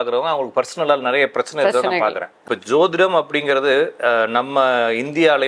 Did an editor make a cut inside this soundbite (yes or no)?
yes